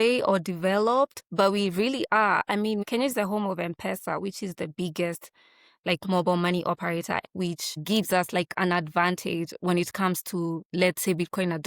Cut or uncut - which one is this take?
cut